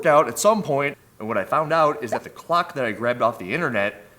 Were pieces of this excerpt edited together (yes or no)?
yes